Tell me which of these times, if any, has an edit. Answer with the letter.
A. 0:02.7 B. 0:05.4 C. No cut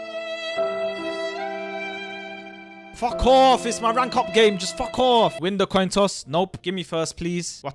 B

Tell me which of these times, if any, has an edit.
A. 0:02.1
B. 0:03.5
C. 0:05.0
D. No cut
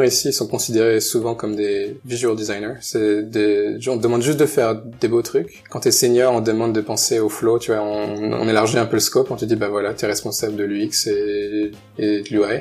D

